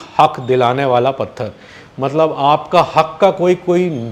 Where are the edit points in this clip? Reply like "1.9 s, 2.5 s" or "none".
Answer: none